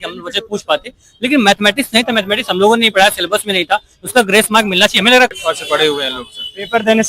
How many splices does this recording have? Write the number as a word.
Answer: one